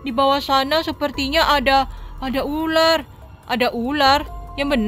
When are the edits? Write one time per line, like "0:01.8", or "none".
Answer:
none